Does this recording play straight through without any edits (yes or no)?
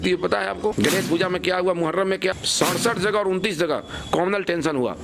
no